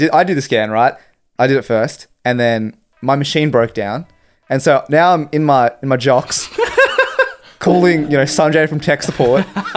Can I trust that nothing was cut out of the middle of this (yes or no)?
yes